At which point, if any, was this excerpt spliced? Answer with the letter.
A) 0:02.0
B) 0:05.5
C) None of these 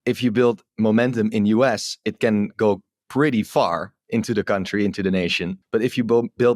B